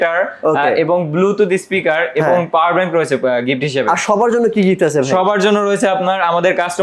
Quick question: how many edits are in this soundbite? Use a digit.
0